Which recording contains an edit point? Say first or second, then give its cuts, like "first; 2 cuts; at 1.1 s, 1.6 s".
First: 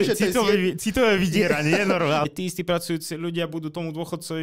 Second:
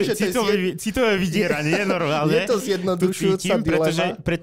first; 1 cut; at 2.2 s